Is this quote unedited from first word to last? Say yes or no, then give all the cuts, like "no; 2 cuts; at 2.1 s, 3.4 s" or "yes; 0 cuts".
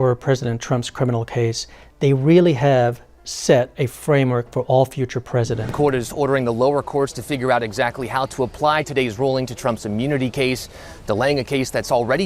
no; 1 cut; at 5.6 s